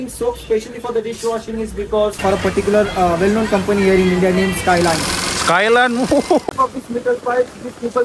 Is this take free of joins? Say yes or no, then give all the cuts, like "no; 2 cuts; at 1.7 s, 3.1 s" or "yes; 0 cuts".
no; 2 cuts; at 2.2 s, 6.5 s